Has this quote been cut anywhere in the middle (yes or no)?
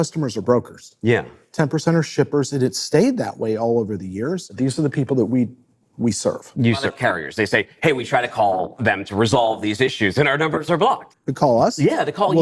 yes